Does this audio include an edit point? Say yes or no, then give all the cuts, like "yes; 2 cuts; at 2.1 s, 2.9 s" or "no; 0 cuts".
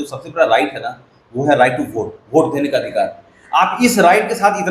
no; 0 cuts